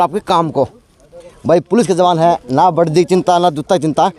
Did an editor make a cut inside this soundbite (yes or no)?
no